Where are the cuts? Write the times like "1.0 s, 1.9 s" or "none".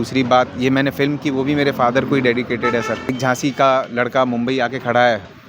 3.1 s